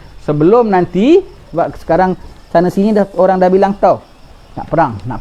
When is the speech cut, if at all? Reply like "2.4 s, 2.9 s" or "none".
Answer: 1.4 s

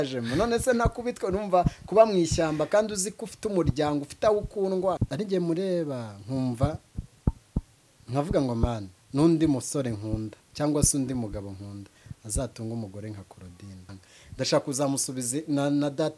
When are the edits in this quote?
5.0 s, 14.0 s

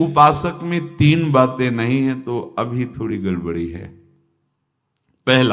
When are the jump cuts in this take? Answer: none

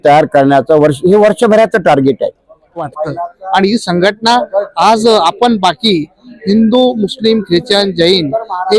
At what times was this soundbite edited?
2.9 s

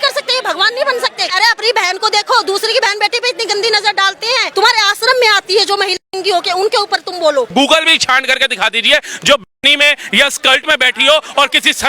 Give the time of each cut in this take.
1.3 s, 4.5 s, 7.5 s

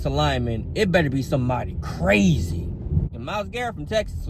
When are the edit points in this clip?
3.0 s

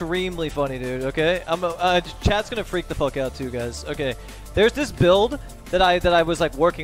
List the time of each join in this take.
none

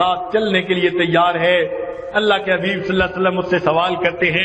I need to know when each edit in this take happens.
none

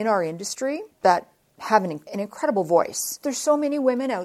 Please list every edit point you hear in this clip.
0.9 s, 2.0 s, 3.2 s

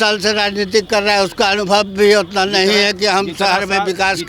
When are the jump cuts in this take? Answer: none

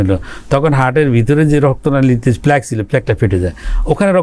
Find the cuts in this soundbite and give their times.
none

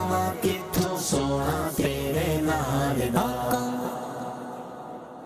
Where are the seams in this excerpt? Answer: none

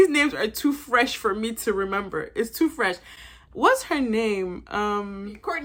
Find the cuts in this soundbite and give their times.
none

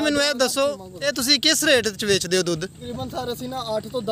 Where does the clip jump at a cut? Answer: 0.9 s, 2.8 s

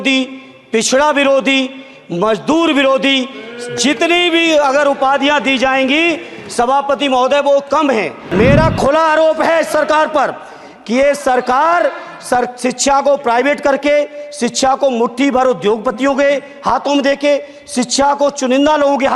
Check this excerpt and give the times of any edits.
8.2 s

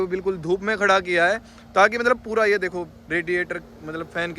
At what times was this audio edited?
none

